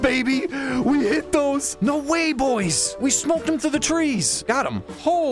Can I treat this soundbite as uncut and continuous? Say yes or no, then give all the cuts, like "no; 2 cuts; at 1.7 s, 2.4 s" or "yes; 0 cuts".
no; 3 cuts; at 1.7 s, 2.8 s, 4.3 s